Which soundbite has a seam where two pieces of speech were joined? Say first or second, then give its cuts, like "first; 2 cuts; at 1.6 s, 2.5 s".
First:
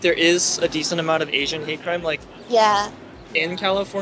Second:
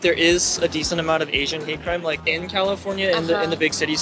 second; 1 cut; at 2.3 s